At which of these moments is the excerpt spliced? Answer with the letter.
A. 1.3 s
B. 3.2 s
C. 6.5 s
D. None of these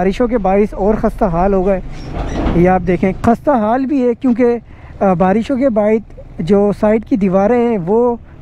B